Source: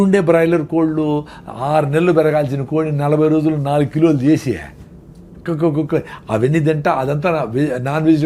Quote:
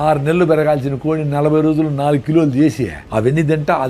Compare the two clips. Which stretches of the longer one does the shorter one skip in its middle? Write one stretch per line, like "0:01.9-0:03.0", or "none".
0:04.7-0:06.2